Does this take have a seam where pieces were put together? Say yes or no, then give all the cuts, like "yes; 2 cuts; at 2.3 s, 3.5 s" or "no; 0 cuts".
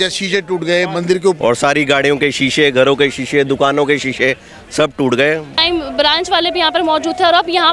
yes; 2 cuts; at 1.4 s, 5.6 s